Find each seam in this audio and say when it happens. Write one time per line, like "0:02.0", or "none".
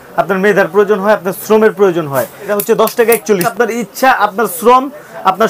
0:02.5
0:03.5